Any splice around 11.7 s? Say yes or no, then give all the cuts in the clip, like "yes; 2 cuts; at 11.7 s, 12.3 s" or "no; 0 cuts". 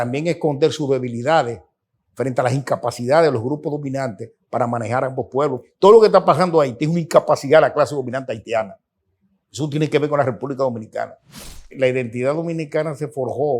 yes; 2 cuts; at 5.7 s, 11.7 s